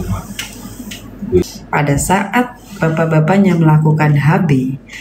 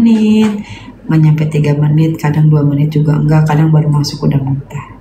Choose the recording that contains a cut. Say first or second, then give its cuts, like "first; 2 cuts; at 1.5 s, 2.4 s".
first; 1 cut; at 1.5 s